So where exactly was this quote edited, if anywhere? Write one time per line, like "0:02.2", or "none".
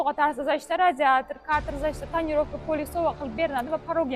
none

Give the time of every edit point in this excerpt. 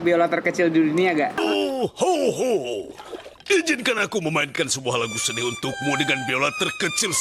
none

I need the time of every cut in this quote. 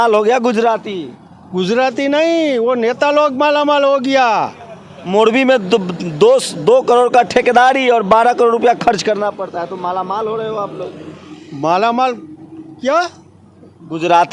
none

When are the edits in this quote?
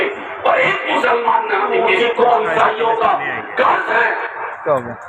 0:01.9

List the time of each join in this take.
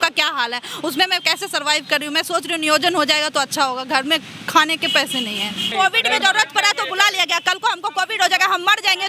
0:05.7

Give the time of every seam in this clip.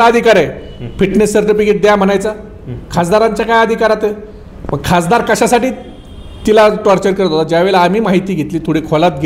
none

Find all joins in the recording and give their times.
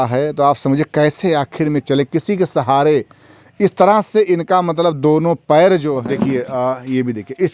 0:06.0

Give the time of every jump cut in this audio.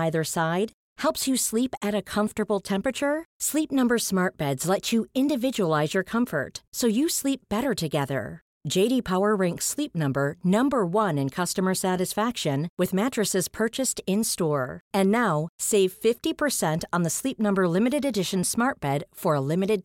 none

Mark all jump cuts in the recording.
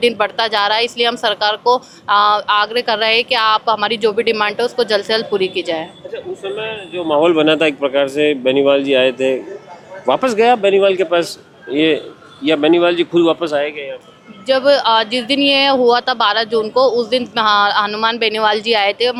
none

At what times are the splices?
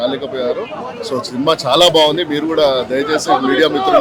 none

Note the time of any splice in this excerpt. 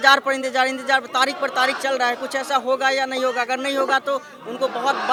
none

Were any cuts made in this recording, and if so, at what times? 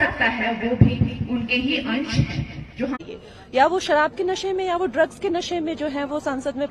0:03.0

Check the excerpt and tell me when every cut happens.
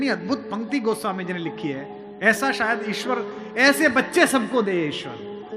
none

